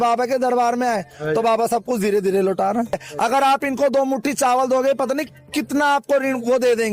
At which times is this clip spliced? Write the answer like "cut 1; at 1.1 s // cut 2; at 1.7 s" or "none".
cut 1; at 3.1 s